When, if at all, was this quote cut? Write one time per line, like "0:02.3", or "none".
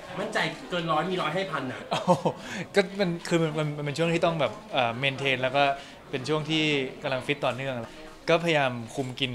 0:07.9

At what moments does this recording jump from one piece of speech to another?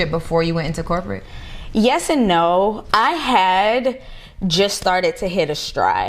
0:02.8

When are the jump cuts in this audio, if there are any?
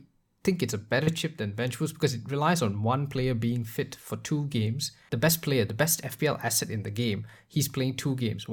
0:05.0

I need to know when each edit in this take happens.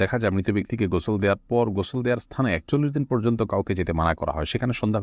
none

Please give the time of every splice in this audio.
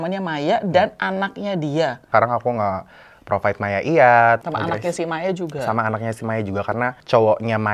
0:02.1
0:04.4

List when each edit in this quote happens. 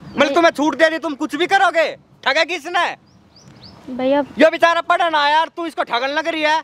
none

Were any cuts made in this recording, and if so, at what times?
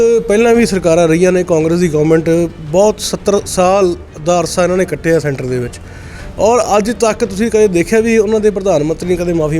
none

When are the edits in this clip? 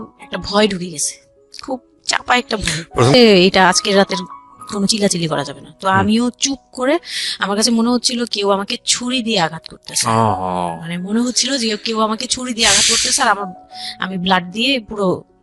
0:03.1

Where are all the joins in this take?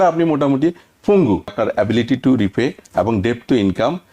0:01.5

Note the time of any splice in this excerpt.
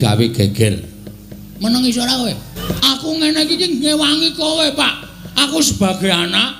0:02.5

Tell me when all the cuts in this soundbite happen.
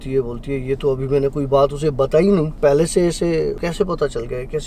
0:02.5
0:03.6

